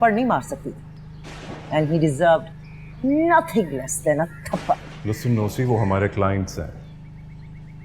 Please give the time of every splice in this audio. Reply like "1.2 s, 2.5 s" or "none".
4.9 s